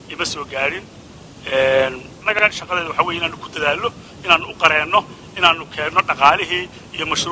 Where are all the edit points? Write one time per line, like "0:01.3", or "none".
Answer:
0:02.4